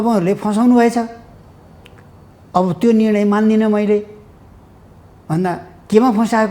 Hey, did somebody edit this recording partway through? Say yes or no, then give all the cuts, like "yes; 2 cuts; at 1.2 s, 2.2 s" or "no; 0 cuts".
no; 0 cuts